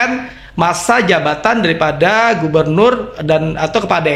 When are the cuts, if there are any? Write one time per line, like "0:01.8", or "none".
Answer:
none